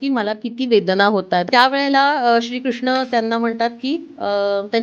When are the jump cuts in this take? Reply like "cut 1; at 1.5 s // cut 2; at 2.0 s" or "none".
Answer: cut 1; at 1.5 s